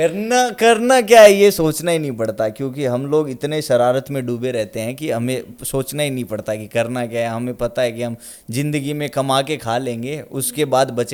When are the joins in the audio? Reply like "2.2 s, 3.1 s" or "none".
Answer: none

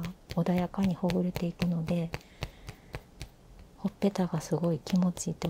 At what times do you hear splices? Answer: none

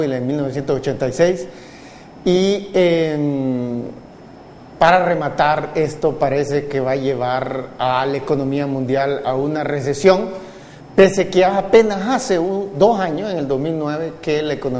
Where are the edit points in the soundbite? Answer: none

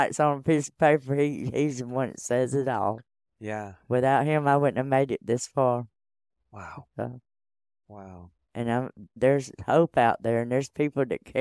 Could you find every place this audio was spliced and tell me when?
none

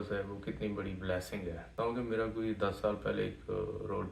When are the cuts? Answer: 1.7 s

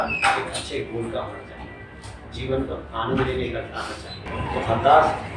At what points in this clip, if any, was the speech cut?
4.1 s

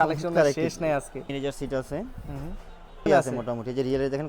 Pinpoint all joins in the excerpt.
1.3 s, 3.0 s

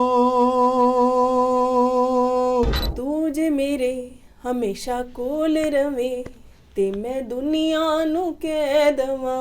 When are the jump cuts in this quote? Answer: 2.9 s

